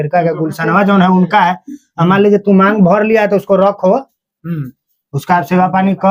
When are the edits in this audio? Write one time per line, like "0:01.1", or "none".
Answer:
none